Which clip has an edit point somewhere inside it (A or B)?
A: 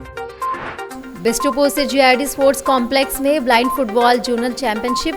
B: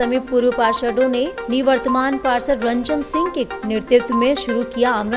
A